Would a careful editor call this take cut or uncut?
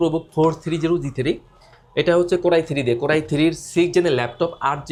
uncut